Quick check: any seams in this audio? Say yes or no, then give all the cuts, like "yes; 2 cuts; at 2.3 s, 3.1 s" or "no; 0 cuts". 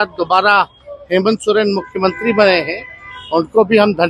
no; 0 cuts